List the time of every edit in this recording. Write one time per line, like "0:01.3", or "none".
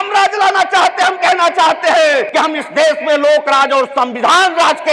0:02.3